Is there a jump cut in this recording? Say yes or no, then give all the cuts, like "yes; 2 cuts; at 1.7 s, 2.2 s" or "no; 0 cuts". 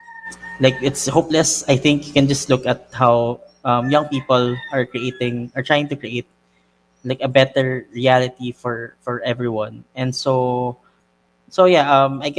no; 0 cuts